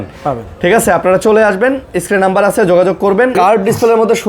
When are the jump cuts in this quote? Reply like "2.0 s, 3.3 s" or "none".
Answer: 3.3 s